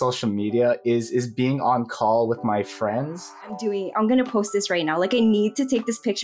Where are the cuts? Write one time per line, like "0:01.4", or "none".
0:03.3